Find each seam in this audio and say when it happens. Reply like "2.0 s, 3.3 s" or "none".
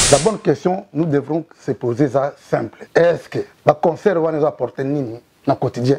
2.8 s, 3.5 s